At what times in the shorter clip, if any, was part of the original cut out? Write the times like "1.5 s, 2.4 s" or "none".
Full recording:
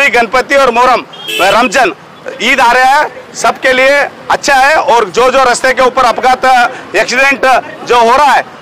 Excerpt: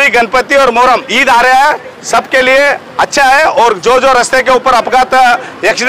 1.1 s